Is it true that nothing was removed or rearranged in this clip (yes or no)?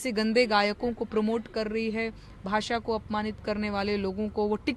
yes